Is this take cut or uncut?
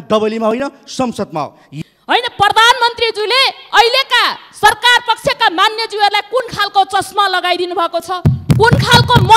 cut